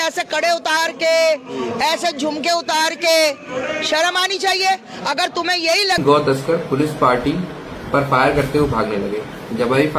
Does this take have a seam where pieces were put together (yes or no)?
yes